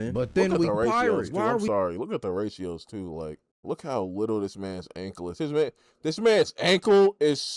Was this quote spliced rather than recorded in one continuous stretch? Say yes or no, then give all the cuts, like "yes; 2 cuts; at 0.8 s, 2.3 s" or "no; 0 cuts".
no; 0 cuts